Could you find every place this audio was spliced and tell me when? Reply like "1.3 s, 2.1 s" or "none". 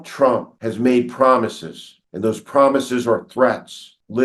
none